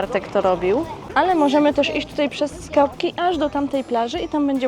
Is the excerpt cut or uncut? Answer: cut